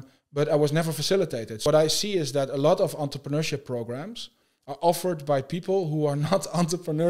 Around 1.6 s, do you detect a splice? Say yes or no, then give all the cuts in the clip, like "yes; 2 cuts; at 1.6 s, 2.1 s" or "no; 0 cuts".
yes; 1 cut; at 1.6 s